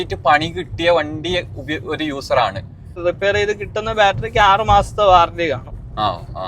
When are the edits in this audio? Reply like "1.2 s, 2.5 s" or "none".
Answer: 2.9 s

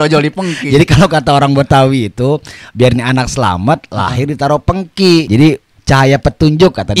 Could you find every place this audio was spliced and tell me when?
5.3 s

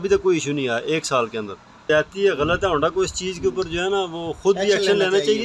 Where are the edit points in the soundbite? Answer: 1.8 s

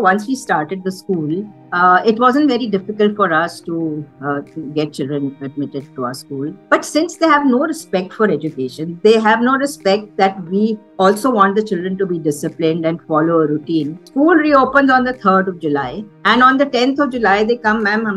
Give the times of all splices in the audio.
6.6 s

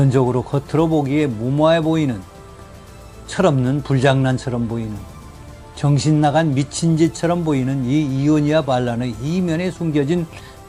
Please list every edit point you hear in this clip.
none

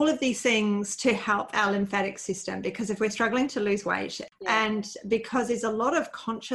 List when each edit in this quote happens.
4.2 s

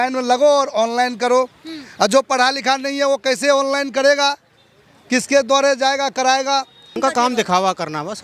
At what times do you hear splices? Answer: 6.9 s

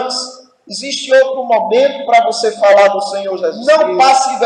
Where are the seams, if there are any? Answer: 3.6 s

